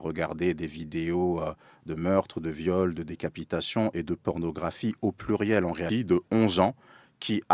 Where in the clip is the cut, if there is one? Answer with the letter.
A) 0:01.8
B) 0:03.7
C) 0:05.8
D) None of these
C